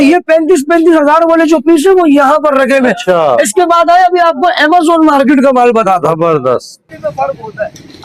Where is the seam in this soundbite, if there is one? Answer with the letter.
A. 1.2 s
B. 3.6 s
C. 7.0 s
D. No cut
D